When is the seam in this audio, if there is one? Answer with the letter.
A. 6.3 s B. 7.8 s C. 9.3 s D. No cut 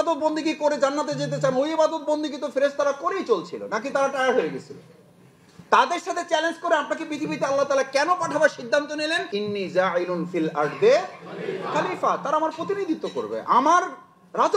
C